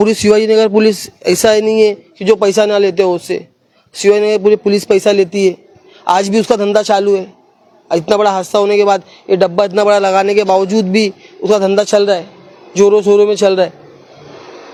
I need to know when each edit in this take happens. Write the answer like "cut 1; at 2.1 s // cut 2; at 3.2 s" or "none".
none